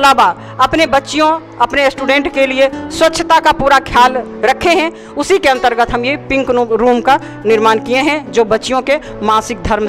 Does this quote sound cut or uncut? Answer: uncut